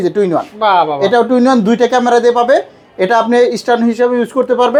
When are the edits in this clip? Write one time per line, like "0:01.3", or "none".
none